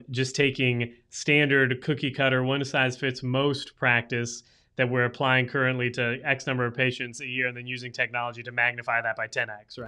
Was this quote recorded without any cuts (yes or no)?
yes